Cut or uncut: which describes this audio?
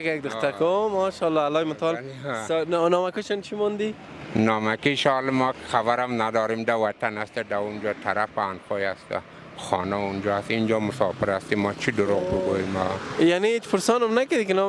uncut